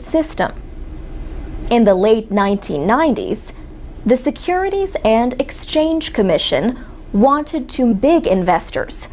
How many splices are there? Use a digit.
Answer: 0